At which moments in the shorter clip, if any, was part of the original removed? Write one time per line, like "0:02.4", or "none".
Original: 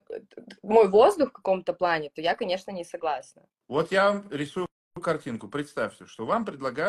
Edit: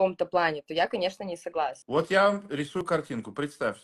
0:01.8
0:02.8